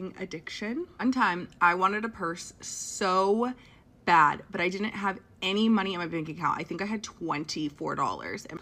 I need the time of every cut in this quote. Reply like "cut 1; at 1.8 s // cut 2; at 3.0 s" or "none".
none